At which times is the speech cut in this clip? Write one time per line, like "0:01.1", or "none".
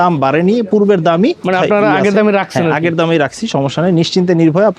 0:01.4